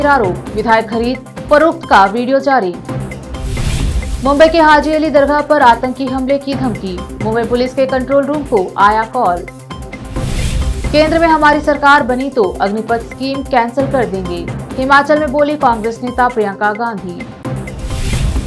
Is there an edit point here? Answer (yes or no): no